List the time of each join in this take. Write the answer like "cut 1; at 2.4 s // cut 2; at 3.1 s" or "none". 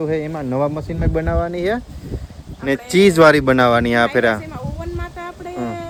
none